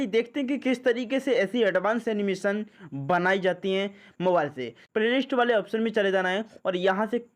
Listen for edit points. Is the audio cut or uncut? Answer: cut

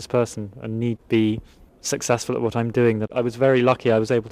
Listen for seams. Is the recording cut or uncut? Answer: cut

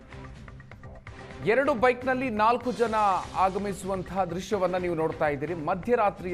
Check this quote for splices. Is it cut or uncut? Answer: cut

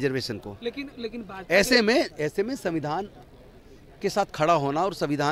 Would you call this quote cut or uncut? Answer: uncut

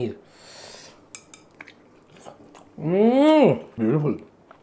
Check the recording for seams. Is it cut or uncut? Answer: uncut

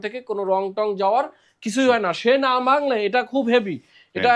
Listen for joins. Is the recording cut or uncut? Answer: uncut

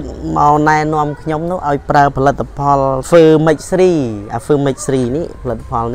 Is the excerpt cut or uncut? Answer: cut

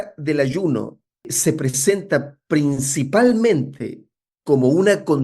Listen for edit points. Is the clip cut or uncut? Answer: cut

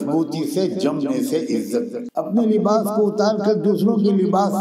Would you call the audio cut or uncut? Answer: cut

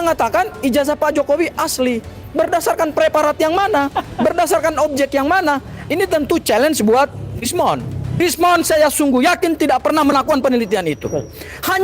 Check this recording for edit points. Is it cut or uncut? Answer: cut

